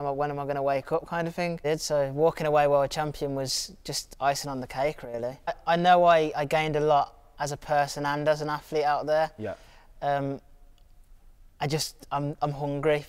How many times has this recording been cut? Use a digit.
2